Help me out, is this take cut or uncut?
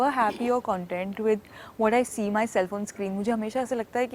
uncut